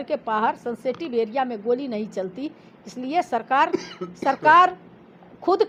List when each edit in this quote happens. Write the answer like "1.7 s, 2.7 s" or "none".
none

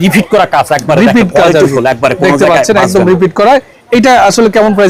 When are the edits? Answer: none

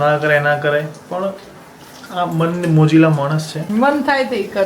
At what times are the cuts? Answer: 3.7 s

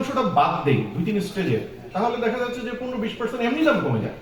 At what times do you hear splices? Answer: none

